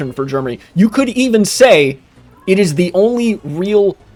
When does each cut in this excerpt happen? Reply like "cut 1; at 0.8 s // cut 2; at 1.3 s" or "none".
none

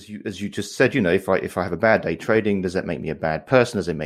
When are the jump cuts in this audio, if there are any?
none

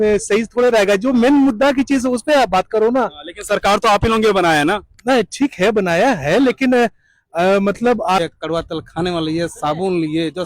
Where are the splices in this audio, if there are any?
cut 1; at 8.2 s

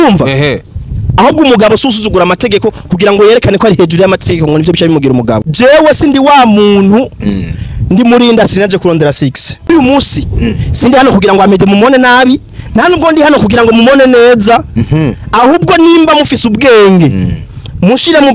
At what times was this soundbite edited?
cut 1; at 5.5 s // cut 2; at 9.7 s

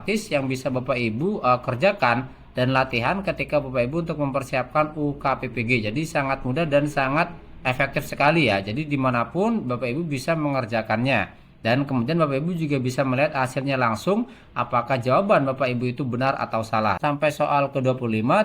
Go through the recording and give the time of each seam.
cut 1; at 17.0 s

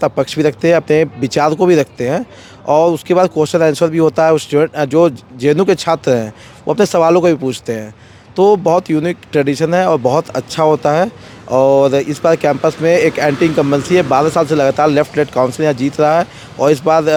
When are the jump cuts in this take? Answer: none

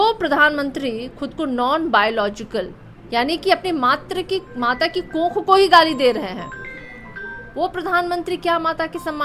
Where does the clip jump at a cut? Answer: none

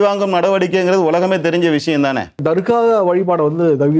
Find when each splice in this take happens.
cut 1; at 2.4 s

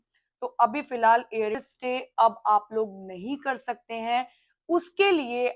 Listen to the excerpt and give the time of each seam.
cut 1; at 1.6 s

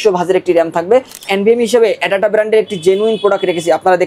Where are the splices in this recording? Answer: cut 1; at 1.2 s

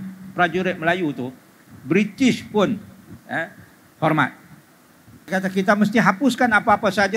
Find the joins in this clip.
cut 1; at 5.3 s

